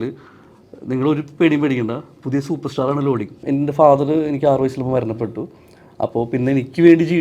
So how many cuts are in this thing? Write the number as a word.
one